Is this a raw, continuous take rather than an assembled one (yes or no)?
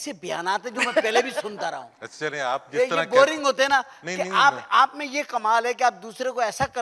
yes